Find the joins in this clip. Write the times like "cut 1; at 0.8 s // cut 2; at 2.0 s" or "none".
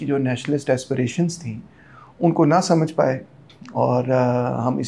none